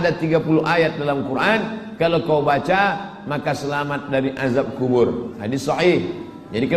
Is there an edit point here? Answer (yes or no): no